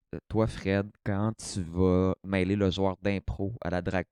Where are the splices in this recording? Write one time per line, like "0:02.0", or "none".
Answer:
none